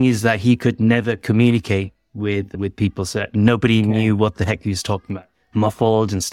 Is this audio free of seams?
no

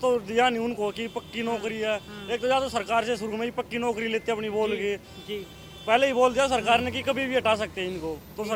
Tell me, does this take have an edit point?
no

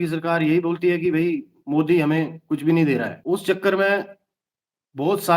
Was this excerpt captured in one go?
no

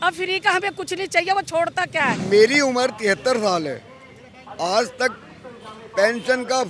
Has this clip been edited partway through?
yes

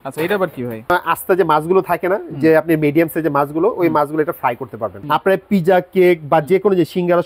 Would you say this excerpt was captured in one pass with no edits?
no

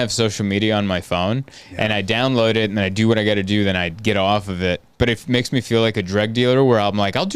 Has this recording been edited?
no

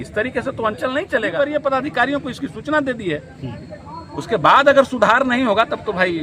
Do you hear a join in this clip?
yes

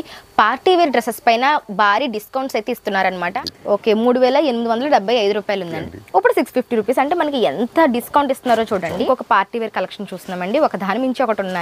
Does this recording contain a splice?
yes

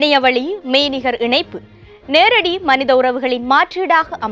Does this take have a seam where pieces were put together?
no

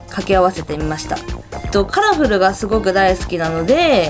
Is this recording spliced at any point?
yes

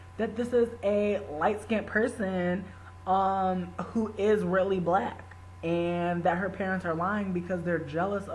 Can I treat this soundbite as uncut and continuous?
yes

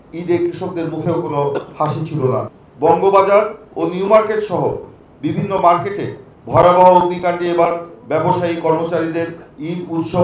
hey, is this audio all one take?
no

